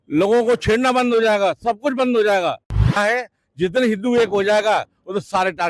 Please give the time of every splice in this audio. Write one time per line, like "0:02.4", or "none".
0:03.0